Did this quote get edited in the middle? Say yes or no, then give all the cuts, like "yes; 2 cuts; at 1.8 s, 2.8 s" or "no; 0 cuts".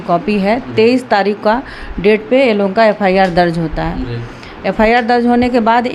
no; 0 cuts